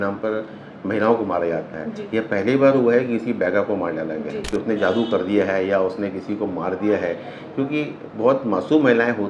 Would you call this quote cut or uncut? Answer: cut